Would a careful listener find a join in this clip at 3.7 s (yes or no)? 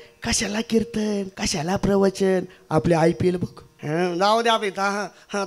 yes